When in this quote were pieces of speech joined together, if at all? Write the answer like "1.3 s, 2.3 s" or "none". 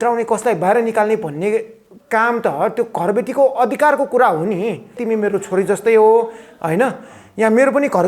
5.0 s

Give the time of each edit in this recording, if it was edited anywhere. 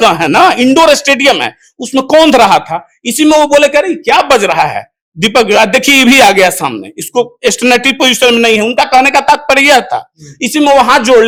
none

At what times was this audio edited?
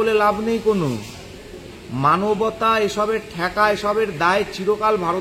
none

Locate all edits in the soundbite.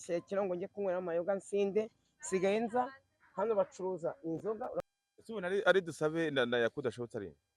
4.8 s

